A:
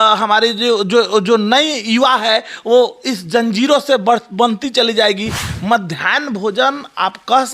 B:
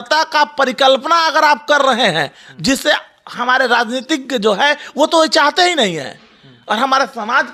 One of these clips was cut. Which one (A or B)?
A